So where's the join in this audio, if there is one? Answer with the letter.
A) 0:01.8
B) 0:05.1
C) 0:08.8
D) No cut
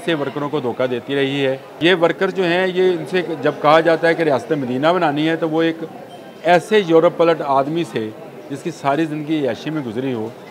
A